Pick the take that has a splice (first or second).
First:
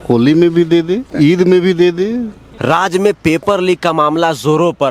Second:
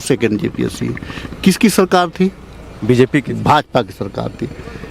first